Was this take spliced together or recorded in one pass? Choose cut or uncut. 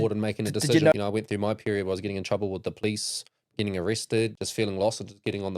cut